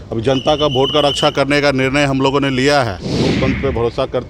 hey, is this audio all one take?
no; 1 cut; at 3.2 s

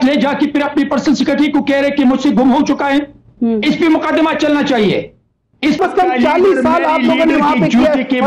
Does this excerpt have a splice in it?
yes; 1 cut; at 5.8 s

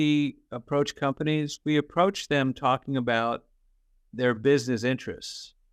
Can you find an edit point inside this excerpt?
no; 0 cuts

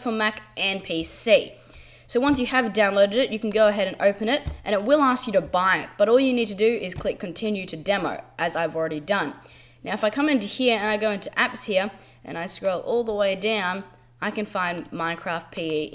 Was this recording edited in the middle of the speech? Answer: no; 0 cuts

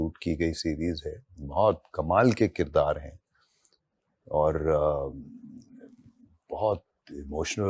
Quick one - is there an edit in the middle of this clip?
no; 0 cuts

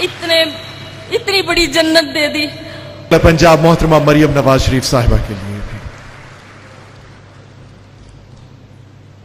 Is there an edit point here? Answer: yes; 1 cut; at 3.1 s

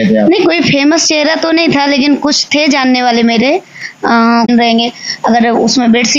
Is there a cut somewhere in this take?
yes; 1 cut; at 4.5 s

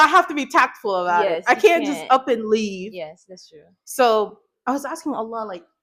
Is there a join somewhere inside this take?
no; 0 cuts

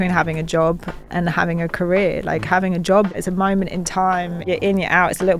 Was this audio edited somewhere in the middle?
yes; 3 cuts; at 0.9 s, 3.2 s, 4.4 s

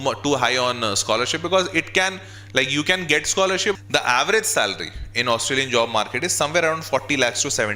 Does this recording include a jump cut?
yes; 1 cut; at 3.7 s

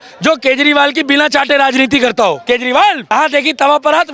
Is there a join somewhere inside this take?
yes; 2 cuts; at 2.4 s, 3.1 s

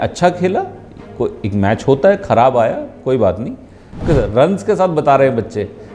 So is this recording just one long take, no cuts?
no; 1 cut; at 4.0 s

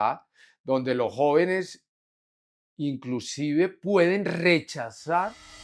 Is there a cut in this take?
no; 0 cuts

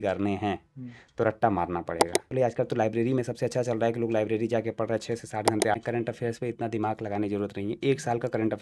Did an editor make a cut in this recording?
yes; 2 cuts; at 2.3 s, 5.8 s

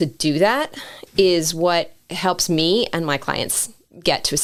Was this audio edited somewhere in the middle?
no; 0 cuts

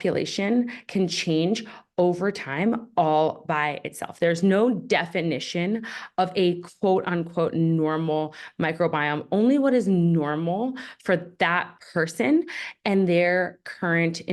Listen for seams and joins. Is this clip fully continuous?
yes; 0 cuts

